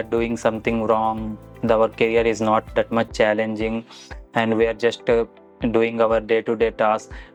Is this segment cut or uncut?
uncut